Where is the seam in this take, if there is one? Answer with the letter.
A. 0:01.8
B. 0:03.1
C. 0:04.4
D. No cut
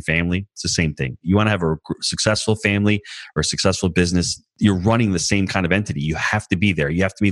C